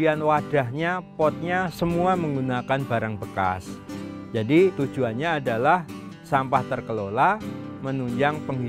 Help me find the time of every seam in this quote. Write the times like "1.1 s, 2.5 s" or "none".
4.8 s